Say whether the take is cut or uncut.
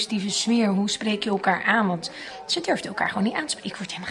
uncut